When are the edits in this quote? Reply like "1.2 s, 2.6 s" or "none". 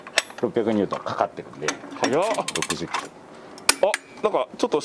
none